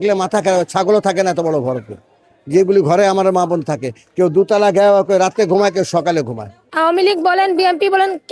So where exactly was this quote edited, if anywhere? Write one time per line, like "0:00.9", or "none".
0:06.5